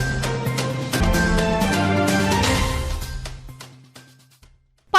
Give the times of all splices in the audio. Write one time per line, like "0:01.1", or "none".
0:01.0